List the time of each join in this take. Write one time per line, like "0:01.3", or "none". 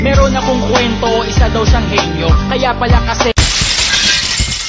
0:03.3